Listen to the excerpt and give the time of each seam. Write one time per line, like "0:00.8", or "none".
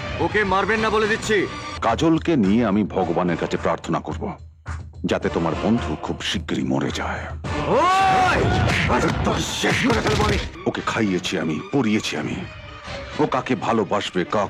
0:01.7
0:10.5